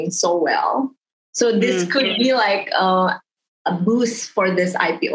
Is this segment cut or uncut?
uncut